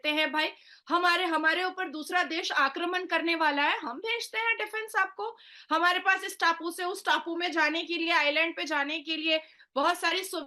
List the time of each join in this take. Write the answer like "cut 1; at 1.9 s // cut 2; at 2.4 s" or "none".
none